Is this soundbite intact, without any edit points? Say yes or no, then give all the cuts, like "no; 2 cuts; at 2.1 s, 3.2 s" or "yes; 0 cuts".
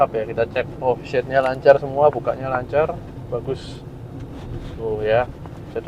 yes; 0 cuts